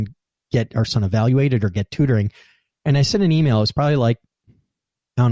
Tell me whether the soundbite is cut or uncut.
uncut